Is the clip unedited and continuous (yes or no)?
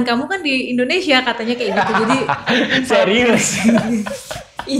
yes